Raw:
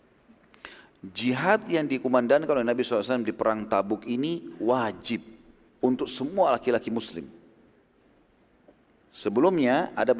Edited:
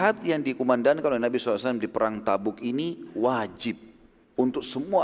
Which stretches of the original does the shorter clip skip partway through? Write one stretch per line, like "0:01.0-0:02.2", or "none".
none